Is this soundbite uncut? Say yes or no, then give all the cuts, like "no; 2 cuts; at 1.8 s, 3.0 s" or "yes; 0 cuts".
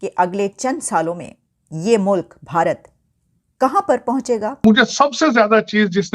no; 1 cut; at 4.6 s